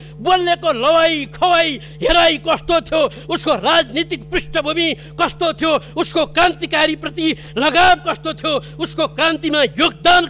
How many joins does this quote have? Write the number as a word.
zero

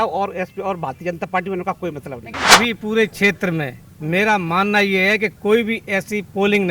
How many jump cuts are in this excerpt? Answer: one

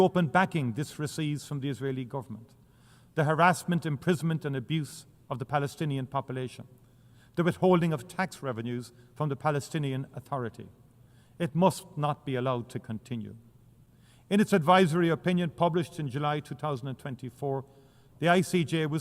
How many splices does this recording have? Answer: zero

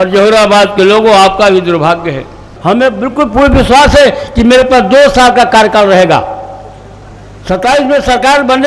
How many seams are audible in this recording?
one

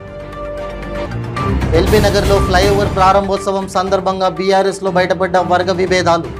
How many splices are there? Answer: zero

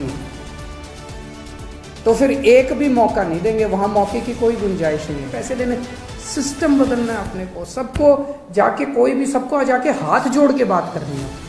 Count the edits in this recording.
one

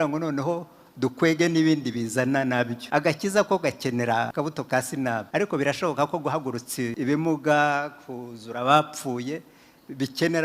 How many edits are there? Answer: four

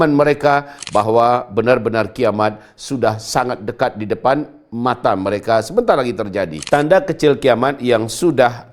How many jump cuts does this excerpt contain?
one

